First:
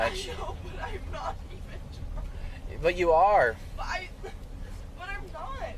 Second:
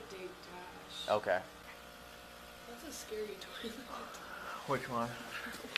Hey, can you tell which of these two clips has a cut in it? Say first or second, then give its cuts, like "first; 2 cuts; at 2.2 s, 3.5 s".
second; 1 cut; at 1.6 s